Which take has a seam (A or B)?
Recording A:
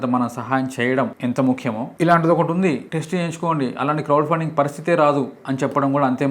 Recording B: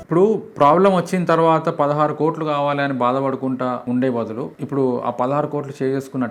A